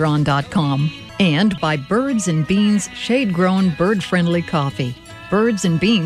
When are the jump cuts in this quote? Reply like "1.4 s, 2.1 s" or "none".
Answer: 1.0 s